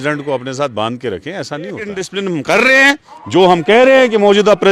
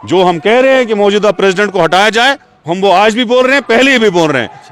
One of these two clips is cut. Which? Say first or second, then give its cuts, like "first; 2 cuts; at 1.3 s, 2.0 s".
first; 1 cut; at 2.0 s